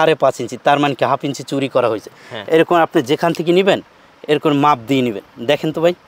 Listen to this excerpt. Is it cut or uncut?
uncut